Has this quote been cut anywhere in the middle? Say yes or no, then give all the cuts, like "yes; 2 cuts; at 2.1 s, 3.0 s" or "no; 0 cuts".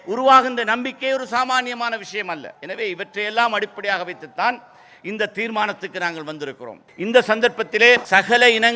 yes; 1 cut; at 6.9 s